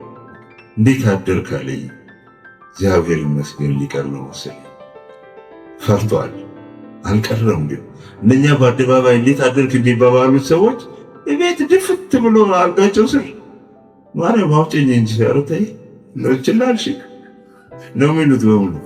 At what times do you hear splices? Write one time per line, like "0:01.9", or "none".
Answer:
none

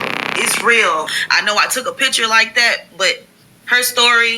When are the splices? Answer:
0:01.2

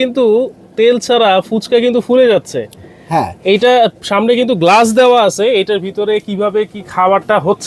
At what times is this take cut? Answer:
none

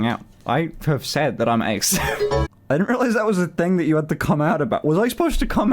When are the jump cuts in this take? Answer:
0:02.5

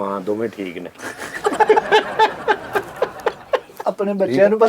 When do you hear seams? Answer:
0:03.8

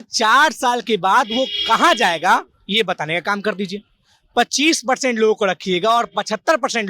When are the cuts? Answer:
none

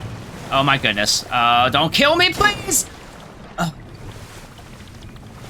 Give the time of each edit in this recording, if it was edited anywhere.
none

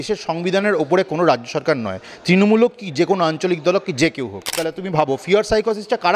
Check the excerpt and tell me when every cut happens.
0:04.7

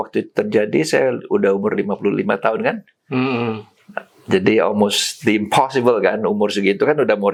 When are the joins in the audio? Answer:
none

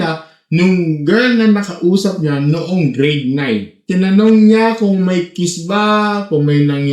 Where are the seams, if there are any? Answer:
0:03.8

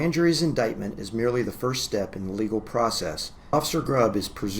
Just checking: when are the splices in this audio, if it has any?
0:03.5

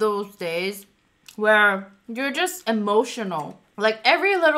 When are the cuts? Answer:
0:03.6

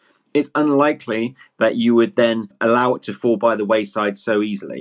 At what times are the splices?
0:02.5

